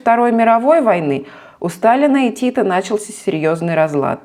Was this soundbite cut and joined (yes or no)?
no